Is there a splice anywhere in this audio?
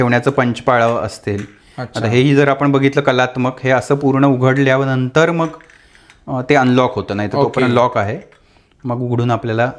no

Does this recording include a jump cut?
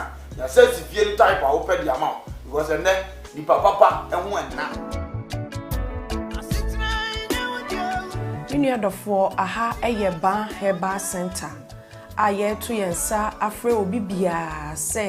yes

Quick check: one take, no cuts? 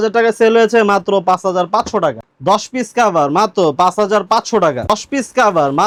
yes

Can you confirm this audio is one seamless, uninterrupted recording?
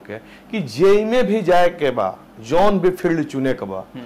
yes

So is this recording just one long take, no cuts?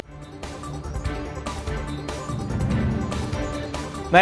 no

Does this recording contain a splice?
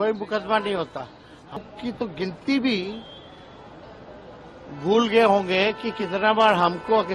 yes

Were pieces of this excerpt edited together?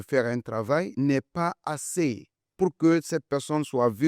yes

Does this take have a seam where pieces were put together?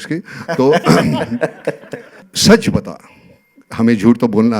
yes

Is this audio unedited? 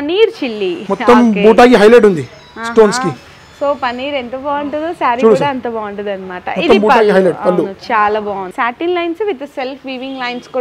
no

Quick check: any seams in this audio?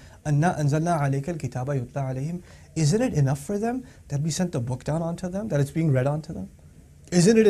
no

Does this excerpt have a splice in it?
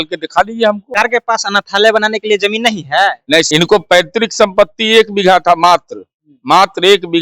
yes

